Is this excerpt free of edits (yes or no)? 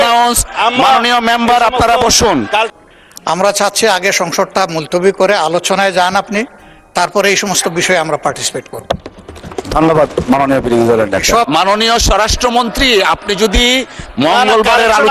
no